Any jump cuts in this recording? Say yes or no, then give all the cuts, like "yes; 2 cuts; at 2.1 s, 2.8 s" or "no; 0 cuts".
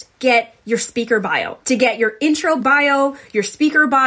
yes; 2 cuts; at 1.5 s, 2.6 s